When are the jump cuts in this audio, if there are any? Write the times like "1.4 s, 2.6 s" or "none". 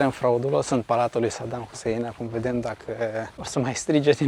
3.4 s